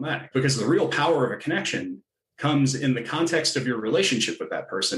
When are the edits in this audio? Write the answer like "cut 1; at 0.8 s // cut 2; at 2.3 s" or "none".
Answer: none

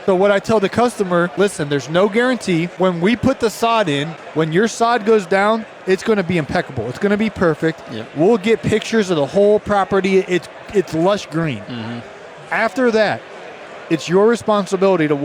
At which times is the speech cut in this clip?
cut 1; at 1.3 s // cut 2; at 2.7 s // cut 3; at 4.1 s

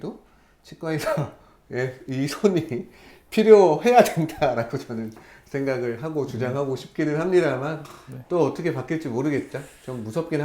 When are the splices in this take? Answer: none

